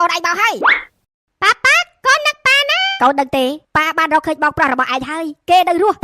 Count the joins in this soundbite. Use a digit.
1